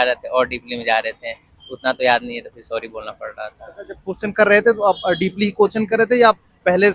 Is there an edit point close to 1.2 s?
no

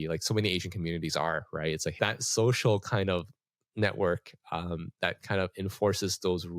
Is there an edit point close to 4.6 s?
no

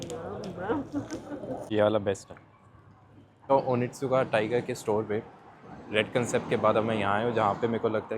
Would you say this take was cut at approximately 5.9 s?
no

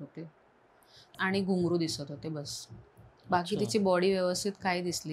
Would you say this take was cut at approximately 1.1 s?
yes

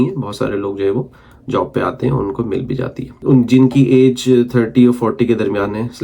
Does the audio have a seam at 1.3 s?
no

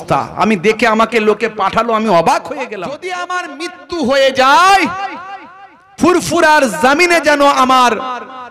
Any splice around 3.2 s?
yes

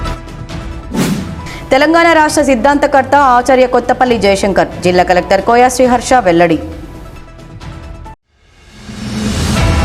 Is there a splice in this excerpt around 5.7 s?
no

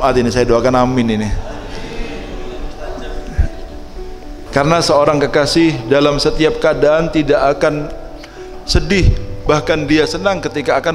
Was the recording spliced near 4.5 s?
yes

